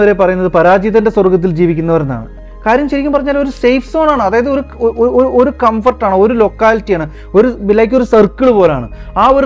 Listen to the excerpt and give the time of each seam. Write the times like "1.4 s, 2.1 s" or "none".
none